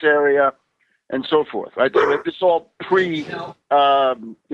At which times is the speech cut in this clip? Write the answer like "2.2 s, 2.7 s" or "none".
none